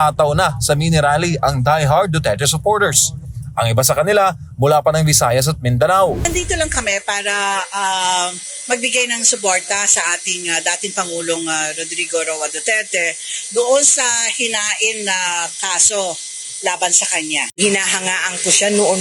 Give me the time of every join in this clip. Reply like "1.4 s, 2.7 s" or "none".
6.3 s